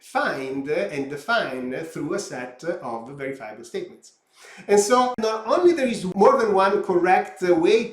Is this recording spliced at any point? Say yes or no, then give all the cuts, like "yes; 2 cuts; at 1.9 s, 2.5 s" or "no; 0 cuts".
yes; 1 cut; at 5.5 s